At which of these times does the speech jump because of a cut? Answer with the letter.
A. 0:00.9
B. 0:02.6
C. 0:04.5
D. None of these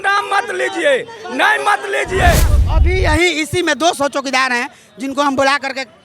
B